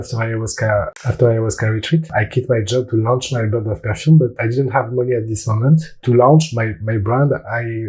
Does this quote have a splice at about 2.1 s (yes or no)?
yes